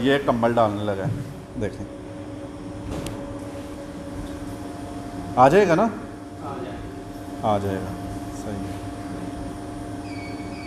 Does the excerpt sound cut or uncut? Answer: uncut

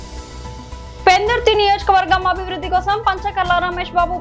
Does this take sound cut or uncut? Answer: cut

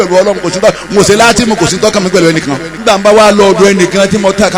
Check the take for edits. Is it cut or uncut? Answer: cut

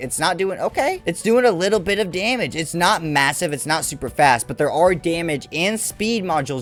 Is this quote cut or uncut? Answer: uncut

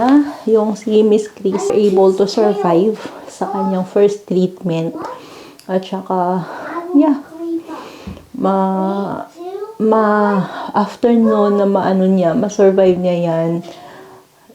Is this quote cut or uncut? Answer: cut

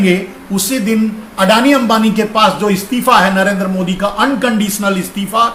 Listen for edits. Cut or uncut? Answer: uncut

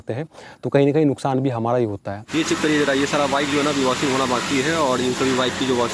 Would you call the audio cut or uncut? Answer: cut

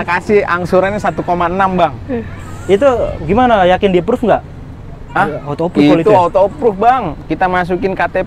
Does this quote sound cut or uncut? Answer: uncut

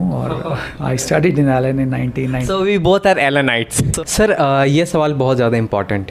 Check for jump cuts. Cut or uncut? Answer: cut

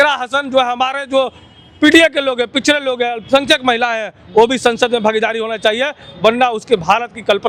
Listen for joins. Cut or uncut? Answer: uncut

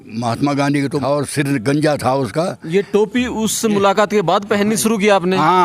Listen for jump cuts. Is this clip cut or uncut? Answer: cut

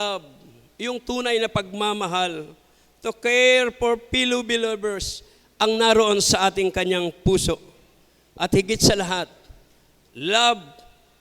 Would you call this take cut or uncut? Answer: uncut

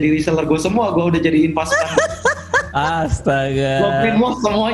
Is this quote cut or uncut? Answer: uncut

